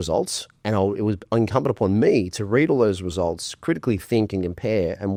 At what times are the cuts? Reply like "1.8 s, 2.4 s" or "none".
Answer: none